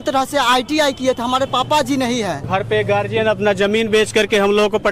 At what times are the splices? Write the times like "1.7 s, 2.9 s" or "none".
2.4 s

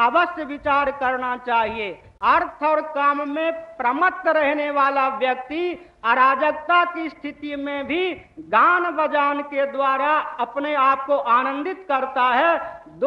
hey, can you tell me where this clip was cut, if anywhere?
2.0 s

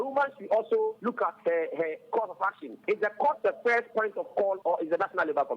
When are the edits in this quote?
1.0 s, 2.8 s, 4.6 s

